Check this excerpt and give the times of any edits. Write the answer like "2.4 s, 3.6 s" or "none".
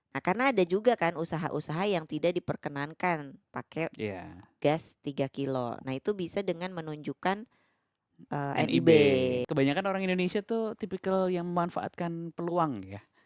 9.5 s

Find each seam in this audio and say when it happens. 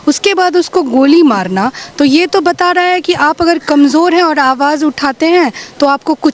none

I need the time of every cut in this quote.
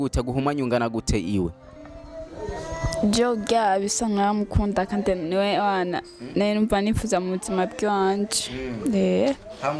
none

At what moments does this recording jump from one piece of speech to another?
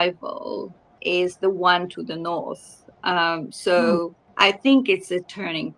1.0 s, 4.2 s

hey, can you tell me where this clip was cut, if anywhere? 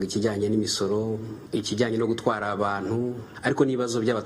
1.3 s, 3.3 s

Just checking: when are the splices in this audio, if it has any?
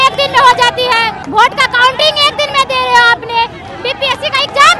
1.2 s

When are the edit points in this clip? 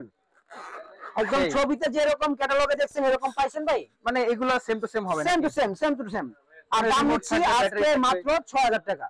none

